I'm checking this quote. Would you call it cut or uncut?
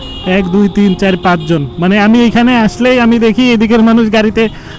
uncut